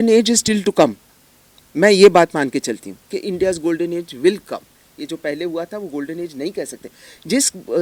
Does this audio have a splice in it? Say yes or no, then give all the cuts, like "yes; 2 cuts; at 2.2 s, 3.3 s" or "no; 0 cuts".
no; 0 cuts